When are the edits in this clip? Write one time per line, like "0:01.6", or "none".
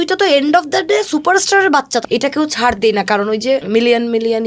0:02.0
0:03.6